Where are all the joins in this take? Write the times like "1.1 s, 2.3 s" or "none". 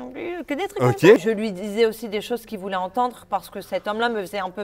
1.2 s